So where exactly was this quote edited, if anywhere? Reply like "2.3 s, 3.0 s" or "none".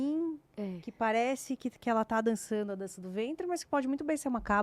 none